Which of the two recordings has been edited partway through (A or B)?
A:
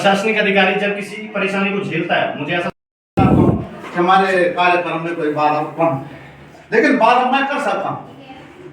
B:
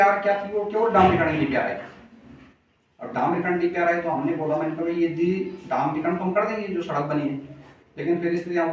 A